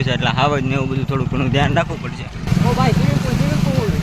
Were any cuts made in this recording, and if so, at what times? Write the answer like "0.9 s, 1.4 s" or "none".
2.3 s